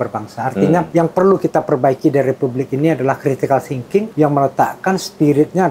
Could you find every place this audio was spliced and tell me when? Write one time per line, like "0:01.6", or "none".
0:00.9
0:04.1